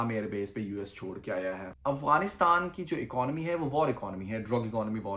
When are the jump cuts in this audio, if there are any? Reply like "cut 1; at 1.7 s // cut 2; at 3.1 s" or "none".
cut 1; at 1.7 s